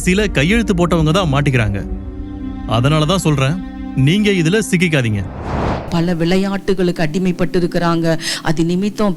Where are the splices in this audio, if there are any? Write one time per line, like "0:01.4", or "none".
0:05.9